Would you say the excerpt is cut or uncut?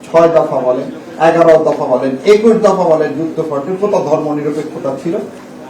uncut